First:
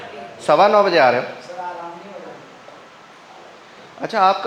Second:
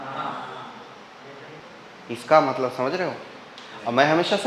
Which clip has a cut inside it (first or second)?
second